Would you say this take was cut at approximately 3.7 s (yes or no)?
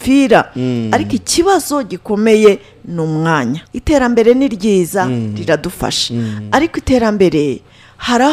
yes